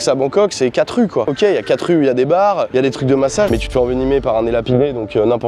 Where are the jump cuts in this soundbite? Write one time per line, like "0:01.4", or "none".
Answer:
0:01.3
0:03.5